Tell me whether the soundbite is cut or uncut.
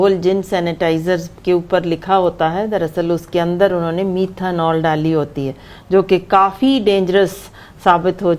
uncut